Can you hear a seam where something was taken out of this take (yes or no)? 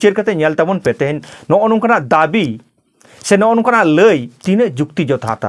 no